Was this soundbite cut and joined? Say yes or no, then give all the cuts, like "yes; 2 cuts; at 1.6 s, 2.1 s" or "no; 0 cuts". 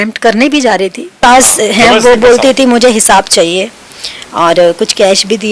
yes; 1 cut; at 1.2 s